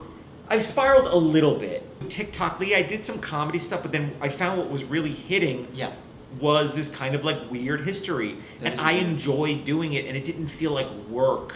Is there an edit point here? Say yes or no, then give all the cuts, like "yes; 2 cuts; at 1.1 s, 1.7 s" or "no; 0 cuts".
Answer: yes; 1 cut; at 2.0 s